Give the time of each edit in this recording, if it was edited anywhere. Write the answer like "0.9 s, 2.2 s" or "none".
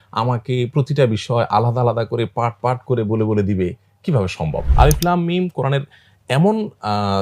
4.6 s